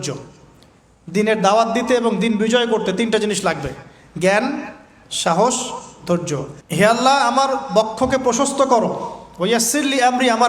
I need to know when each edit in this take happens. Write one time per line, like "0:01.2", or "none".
0:06.5